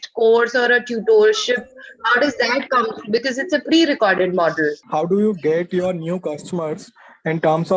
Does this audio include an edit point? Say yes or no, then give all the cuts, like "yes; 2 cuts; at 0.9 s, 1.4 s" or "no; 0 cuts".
yes; 1 cut; at 4.8 s